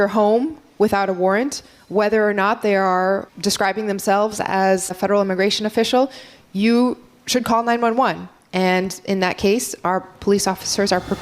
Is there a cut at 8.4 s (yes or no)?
no